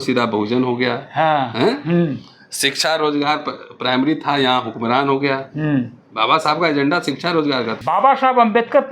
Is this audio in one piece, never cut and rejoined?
no; 1 cut; at 7.7 s

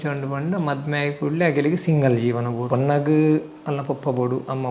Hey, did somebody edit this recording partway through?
yes; 1 cut; at 2.6 s

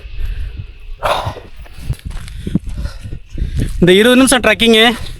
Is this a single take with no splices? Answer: no; 1 cut; at 2.1 s

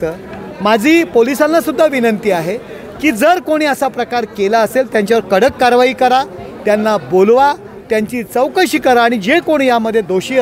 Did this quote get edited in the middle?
no; 0 cuts

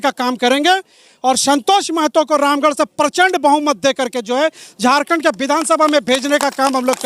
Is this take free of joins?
yes; 0 cuts

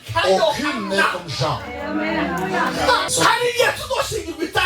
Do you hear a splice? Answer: yes; 1 cut; at 3.1 s

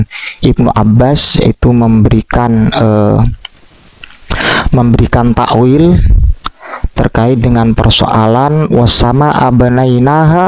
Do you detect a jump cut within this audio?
no; 0 cuts

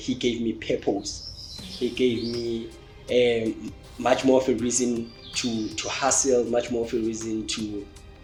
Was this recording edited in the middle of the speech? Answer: no; 0 cuts

